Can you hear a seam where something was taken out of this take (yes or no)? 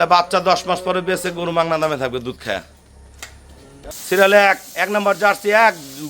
yes